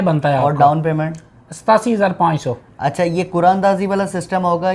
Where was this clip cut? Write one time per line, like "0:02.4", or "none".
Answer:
none